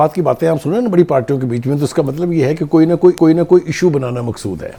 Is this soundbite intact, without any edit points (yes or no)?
yes